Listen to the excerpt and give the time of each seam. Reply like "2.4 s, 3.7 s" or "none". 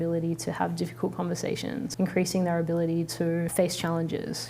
1.9 s, 3.5 s